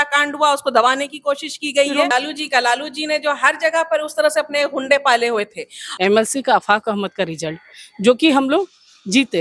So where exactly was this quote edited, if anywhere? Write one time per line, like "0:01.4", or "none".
0:02.1
0:05.8